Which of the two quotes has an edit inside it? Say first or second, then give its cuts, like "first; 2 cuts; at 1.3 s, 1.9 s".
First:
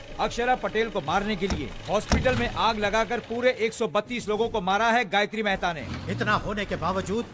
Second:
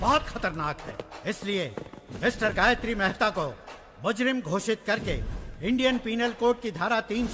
first; 1 cut; at 5.8 s